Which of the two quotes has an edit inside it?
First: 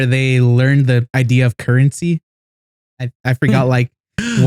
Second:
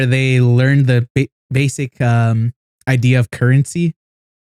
first; 1 cut; at 1.1 s

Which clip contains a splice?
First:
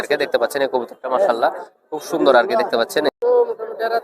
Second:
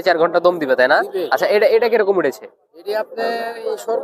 first; 1 cut; at 3.1 s

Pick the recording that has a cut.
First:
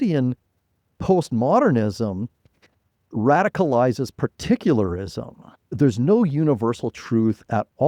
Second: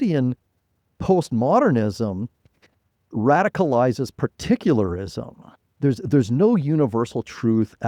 first; 1 cut; at 5.7 s

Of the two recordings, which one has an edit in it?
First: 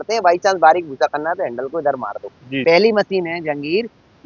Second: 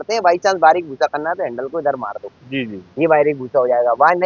first; 1 cut; at 2.6 s

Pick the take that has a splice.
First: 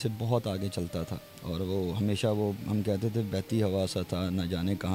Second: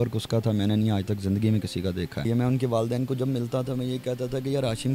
second; 1 cut; at 2.3 s

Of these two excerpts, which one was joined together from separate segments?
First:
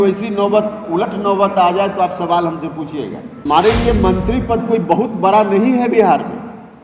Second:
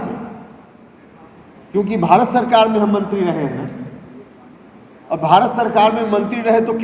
first; 1 cut; at 3.4 s

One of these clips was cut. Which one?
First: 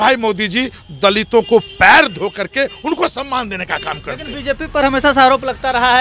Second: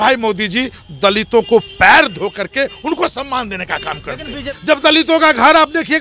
second; 1 cut; at 4.5 s

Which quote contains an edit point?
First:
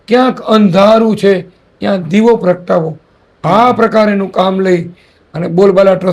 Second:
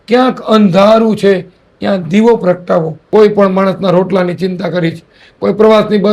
second; 1 cut; at 3.0 s

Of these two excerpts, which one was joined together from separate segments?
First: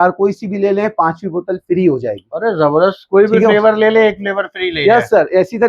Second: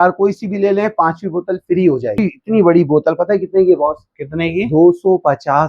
second; 1 cut; at 2.2 s

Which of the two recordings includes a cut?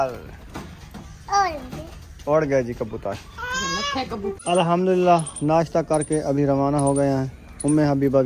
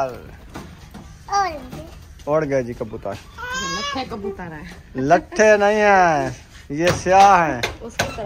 first; 1 cut; at 4.5 s

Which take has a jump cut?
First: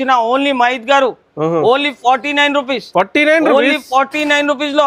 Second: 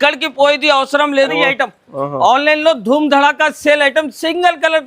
second; 1 cut; at 1.3 s

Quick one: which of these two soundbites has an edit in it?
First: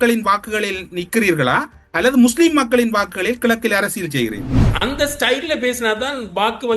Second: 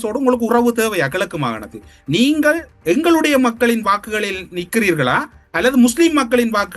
first; 1 cut; at 4.7 s

